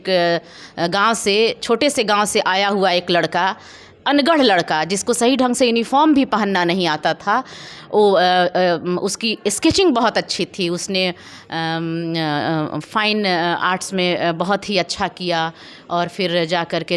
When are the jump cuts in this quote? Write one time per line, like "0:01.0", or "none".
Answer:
none